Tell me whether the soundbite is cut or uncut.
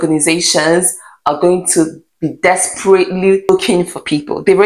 cut